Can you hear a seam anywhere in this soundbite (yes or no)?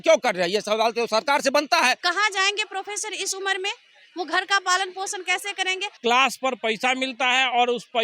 yes